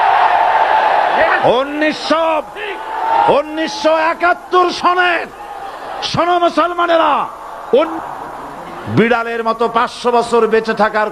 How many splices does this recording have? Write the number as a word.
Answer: one